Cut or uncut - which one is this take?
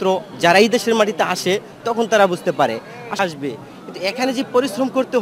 cut